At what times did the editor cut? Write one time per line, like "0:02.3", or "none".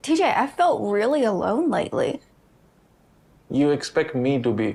none